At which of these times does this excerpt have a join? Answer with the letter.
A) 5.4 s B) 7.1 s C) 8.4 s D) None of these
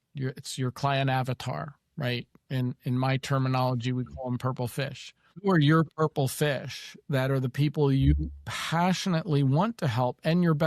A